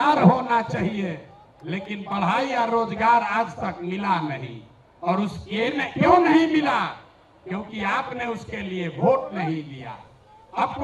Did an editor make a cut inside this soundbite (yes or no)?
no